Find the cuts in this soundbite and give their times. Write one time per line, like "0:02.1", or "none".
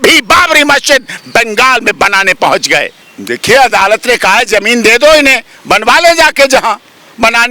0:03.0